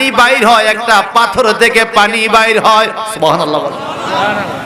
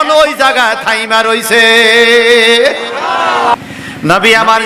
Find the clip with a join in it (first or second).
second